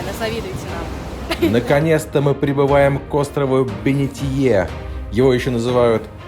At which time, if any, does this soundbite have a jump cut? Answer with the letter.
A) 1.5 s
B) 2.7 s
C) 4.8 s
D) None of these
A